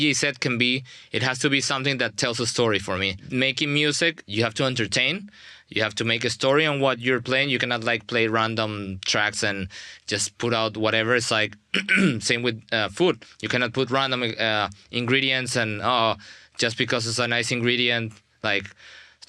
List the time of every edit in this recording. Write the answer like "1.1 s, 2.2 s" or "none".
3.2 s, 4.2 s